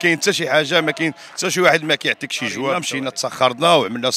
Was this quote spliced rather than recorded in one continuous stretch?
yes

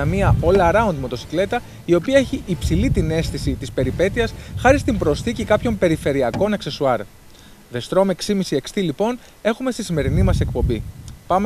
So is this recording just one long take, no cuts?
no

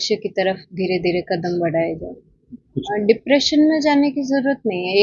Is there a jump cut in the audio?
yes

